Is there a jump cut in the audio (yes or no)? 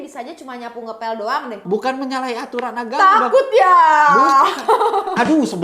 yes